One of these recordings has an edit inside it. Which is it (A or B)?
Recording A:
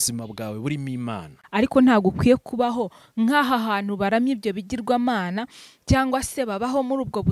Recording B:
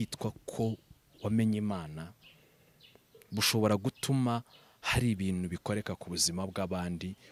A